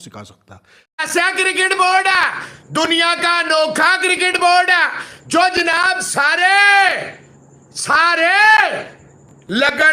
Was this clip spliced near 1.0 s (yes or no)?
yes